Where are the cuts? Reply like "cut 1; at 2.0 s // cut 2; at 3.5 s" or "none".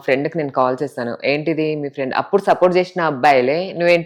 none